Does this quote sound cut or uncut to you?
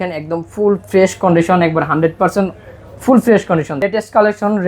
cut